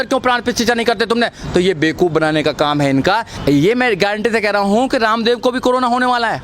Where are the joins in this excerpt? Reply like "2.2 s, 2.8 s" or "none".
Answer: 3.3 s